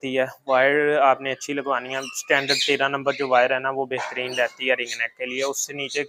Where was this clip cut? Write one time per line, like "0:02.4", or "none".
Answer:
none